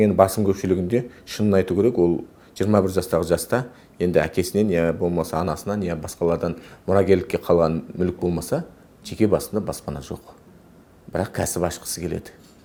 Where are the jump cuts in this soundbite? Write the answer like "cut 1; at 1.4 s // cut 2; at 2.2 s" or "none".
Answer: none